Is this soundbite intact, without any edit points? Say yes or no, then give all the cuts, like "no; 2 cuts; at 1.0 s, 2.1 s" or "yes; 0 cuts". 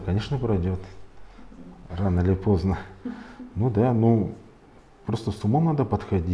yes; 0 cuts